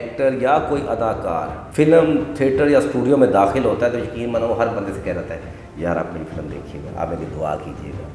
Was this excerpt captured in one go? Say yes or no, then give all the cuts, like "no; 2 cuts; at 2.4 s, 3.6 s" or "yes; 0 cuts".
no; 1 cut; at 1.6 s